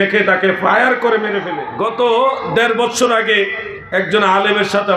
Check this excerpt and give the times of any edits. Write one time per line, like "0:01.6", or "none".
0:01.6